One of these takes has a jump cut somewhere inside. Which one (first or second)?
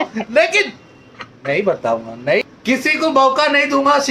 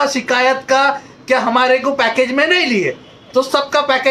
first